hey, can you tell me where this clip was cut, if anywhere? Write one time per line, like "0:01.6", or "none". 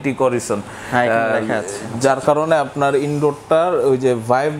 none